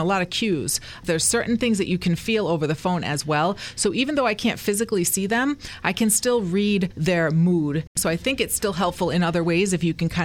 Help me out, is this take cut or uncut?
cut